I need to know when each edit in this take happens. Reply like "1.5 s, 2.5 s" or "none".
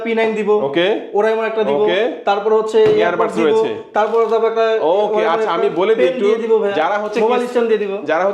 none